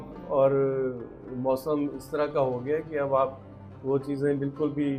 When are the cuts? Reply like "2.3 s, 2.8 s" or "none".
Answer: none